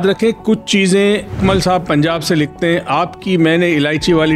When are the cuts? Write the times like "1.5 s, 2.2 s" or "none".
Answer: 1.3 s